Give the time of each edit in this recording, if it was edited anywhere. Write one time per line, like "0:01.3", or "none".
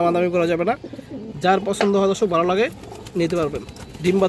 none

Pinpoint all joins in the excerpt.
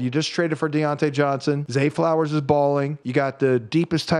0:01.6
0:03.0

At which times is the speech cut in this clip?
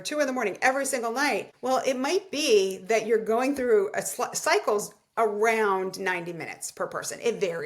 0:01.5

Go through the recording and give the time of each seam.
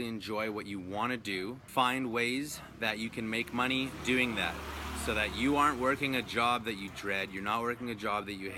0:01.6

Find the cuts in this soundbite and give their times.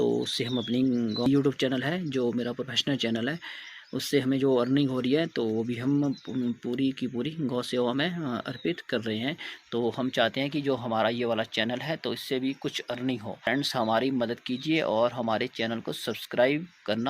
0:01.3
0:13.4

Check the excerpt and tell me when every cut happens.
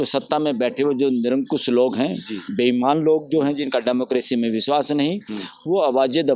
none

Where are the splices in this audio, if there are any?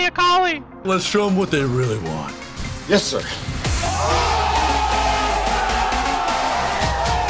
none

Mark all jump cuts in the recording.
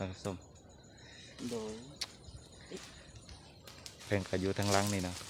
none

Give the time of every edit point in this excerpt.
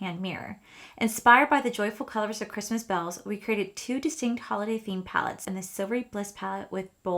0:05.4

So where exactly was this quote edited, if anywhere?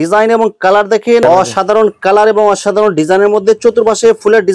0:01.2

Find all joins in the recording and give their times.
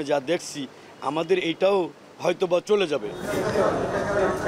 none

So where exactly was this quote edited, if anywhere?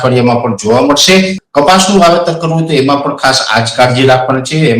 0:01.4

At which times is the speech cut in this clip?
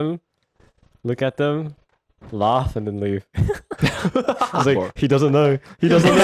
none

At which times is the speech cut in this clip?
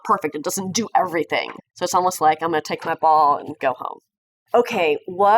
0:01.5
0:04.4

